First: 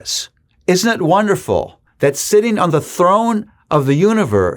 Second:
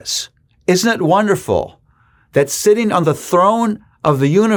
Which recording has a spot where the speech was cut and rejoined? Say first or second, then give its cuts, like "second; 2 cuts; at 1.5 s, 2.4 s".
first; 1 cut; at 1.8 s